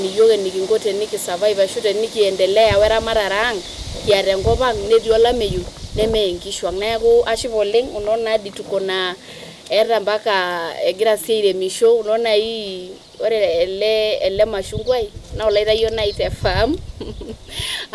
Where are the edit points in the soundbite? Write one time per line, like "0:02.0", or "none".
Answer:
none